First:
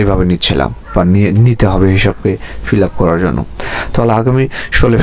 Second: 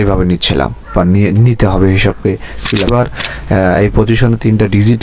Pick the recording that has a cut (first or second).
second